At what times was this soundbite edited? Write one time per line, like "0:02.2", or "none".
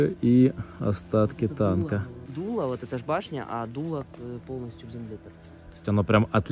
none